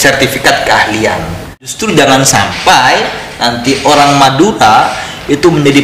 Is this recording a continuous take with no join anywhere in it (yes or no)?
no